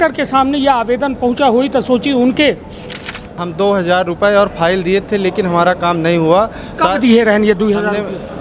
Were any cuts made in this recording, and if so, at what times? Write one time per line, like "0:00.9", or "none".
0:03.4